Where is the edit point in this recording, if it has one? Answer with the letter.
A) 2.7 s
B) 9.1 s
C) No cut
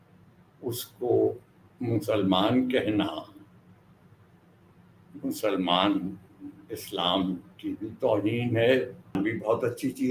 B